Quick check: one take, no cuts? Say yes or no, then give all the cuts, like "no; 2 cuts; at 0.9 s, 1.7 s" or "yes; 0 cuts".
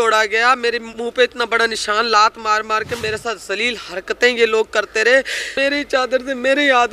no; 3 cuts; at 0.9 s, 3.0 s, 5.5 s